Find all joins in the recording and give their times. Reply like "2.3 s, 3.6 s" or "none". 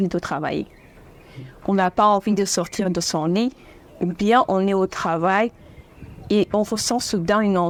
none